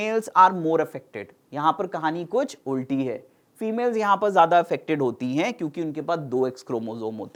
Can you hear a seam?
no; 0 cuts

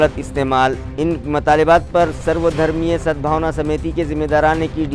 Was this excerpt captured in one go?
yes; 0 cuts

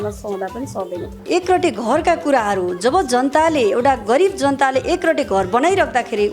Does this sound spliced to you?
yes; 1 cut; at 1.2 s

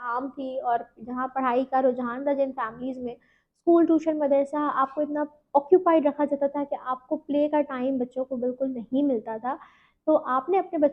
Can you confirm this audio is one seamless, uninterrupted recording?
yes; 0 cuts

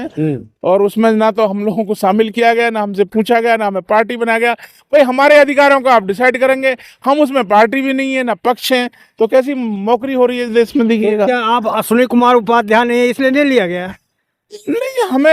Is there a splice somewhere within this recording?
no; 0 cuts

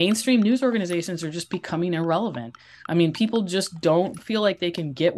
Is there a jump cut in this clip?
yes; 1 cut; at 4.2 s

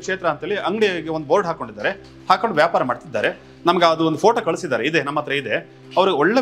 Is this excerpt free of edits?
yes; 0 cuts

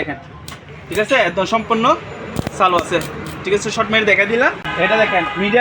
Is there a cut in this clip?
yes; 1 cut; at 4.6 s

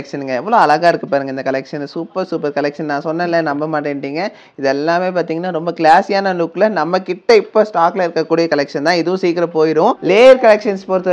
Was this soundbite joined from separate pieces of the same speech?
yes; 1 cut; at 10.0 s

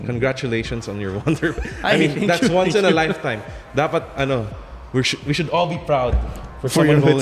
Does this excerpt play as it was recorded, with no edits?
yes; 0 cuts

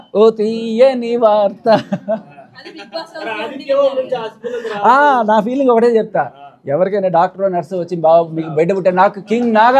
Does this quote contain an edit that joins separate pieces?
no; 0 cuts

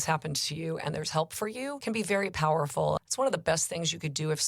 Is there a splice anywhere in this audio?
yes; 2 cuts; at 1.8 s, 3.0 s

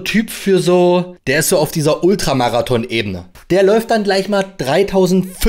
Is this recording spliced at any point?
yes; 2 cuts; at 1.2 s, 3.3 s

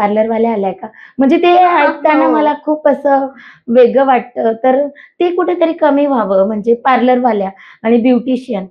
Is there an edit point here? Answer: no; 0 cuts

